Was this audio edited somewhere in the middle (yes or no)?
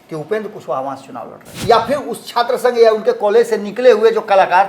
yes